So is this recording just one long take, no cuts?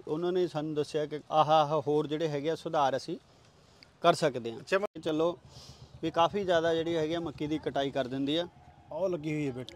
no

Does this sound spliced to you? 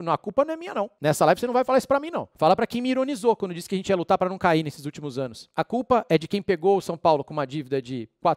yes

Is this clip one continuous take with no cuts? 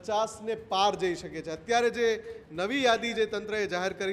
yes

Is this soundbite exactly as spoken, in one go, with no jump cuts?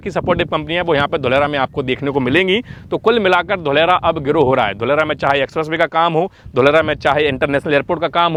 yes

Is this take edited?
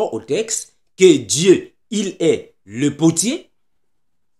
no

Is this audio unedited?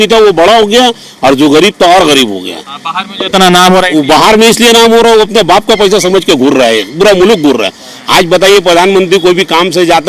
yes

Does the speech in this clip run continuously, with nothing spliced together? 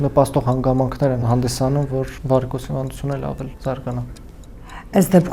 no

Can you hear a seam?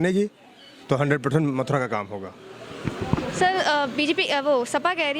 no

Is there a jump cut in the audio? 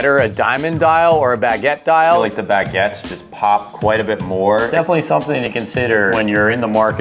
yes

